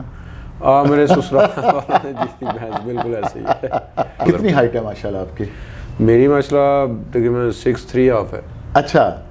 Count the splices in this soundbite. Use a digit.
1